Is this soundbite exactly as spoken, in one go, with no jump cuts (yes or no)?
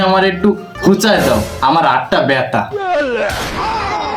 yes